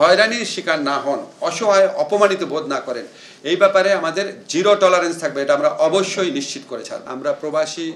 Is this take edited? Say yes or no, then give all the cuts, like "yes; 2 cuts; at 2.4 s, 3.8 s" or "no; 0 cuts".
yes; 1 cut; at 7.0 s